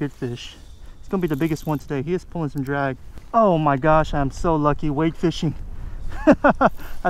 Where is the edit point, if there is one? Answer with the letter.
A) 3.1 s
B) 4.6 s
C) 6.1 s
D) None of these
A